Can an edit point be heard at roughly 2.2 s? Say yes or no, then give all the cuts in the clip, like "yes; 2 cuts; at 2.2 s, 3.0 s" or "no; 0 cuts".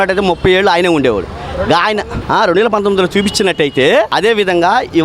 yes; 2 cuts; at 2.2 s, 4.1 s